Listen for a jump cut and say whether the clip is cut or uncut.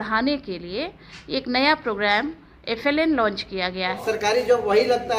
cut